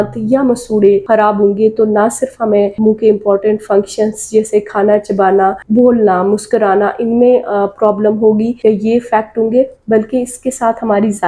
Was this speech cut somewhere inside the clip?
no; 0 cuts

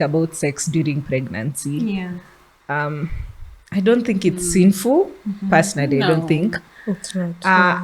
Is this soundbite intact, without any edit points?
yes; 0 cuts

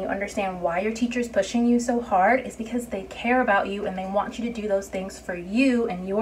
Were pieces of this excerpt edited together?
no; 0 cuts

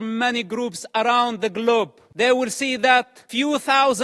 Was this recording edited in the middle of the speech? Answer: yes; 2 cuts; at 2.0 s, 3.2 s

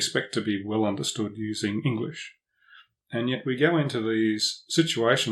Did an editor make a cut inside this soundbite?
no; 0 cuts

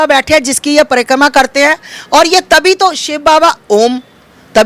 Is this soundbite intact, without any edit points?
yes; 0 cuts

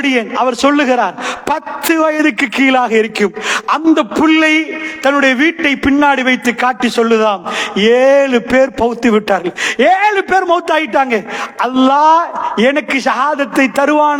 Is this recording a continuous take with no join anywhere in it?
yes; 0 cuts

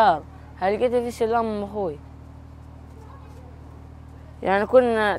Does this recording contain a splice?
no; 0 cuts

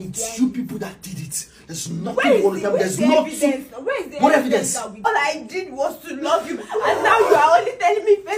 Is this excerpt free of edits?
no; 1 cut; at 5.1 s

